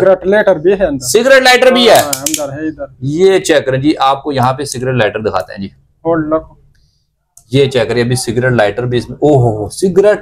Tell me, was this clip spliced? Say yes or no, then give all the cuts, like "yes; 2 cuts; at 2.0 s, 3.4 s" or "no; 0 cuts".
no; 0 cuts